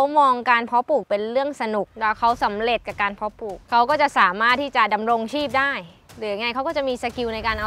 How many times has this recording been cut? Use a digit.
2